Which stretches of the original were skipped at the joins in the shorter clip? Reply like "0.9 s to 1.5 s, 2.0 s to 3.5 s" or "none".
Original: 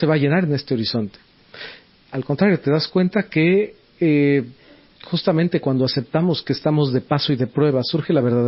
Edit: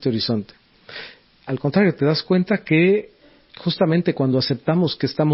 3.8 s to 4.6 s